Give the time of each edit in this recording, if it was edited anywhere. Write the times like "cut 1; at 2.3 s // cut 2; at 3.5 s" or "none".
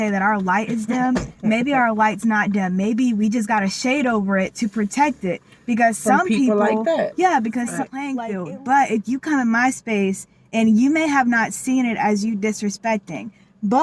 cut 1; at 8.1 s